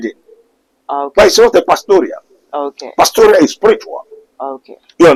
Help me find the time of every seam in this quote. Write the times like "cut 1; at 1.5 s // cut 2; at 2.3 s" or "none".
none